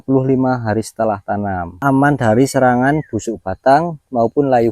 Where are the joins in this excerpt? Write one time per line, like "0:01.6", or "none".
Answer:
0:01.8